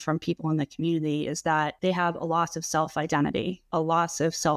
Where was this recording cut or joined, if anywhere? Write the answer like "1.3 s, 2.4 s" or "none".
1.7 s, 3.6 s